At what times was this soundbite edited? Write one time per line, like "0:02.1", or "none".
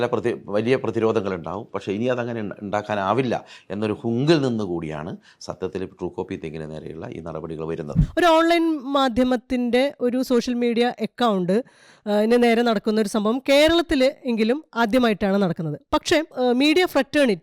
0:07.9
0:16.3